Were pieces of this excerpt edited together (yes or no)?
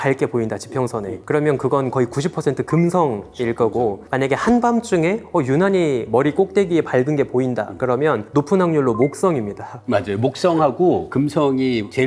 no